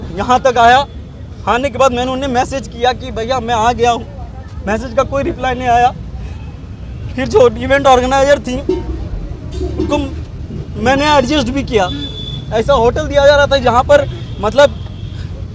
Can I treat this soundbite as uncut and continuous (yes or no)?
yes